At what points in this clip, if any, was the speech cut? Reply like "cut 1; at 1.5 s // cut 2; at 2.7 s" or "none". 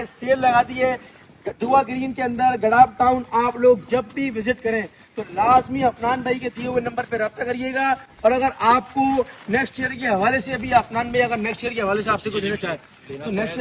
none